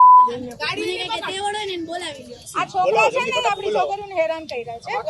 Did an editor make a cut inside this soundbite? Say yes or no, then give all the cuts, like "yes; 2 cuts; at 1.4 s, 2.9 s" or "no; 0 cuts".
yes; 1 cut; at 2.4 s